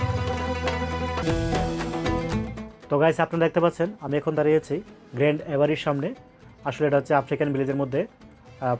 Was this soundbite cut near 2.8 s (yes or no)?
yes